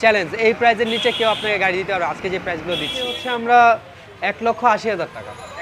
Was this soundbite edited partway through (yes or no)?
yes